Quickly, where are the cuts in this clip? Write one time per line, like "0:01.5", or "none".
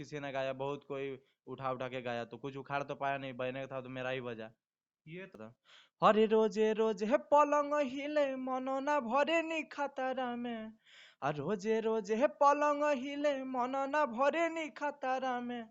0:05.4